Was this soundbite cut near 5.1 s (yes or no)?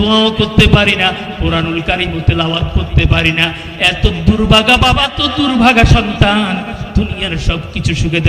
yes